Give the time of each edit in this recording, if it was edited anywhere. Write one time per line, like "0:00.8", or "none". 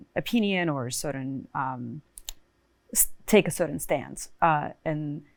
none